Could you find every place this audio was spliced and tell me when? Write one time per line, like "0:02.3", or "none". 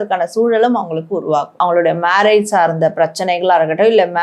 0:01.6